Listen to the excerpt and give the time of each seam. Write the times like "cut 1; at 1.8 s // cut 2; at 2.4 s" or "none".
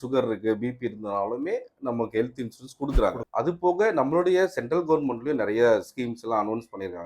cut 1; at 3.2 s